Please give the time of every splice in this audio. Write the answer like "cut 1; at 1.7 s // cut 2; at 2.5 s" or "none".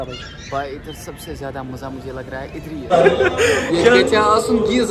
cut 1; at 2.9 s

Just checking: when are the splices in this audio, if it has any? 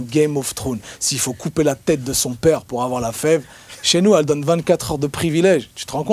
none

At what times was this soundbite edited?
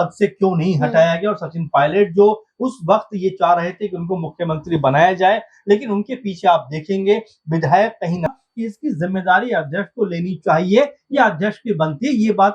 cut 1; at 8.3 s

